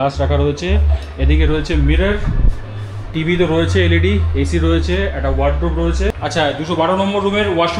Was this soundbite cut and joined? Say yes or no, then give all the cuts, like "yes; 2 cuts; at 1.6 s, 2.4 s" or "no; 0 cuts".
yes; 1 cut; at 6.2 s